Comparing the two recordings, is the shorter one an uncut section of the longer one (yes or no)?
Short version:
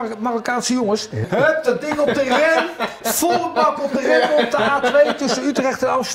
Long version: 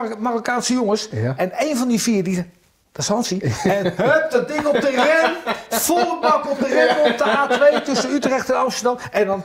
no